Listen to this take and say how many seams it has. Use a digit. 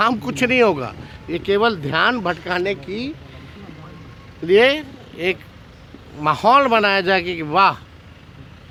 0